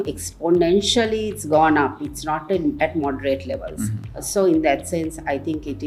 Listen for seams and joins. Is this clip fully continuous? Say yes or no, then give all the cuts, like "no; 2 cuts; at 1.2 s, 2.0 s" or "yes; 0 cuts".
yes; 0 cuts